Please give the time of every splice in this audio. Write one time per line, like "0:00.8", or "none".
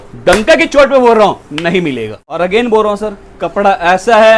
0:02.4